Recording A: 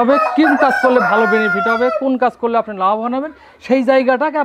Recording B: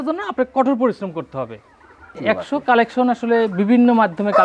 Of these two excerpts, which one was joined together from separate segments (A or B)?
B